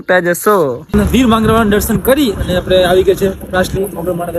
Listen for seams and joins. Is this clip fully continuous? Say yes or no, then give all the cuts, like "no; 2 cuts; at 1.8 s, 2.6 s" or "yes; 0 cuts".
no; 1 cut; at 0.9 s